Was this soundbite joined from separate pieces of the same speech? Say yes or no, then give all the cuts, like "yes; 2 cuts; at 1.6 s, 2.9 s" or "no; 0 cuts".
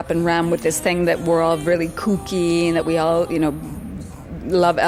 no; 0 cuts